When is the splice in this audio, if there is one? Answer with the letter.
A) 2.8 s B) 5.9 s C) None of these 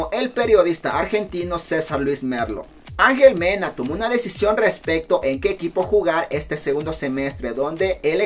A